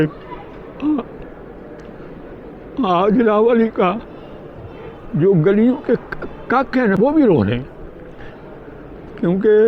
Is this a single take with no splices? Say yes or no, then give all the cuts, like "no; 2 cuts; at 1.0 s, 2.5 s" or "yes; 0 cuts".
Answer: no; 1 cut; at 7.0 s